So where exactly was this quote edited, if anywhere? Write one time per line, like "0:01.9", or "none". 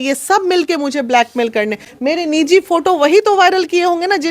none